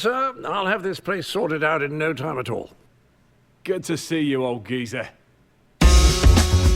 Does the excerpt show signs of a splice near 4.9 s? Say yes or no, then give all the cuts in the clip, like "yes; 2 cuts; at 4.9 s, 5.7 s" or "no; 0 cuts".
no; 1 cut; at 1.9 s